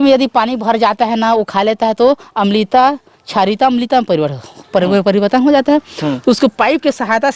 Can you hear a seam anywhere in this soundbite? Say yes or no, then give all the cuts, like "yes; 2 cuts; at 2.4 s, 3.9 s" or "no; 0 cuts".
no; 0 cuts